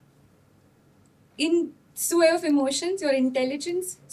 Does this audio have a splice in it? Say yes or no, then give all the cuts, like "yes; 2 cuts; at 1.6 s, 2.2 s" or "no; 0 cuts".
no; 0 cuts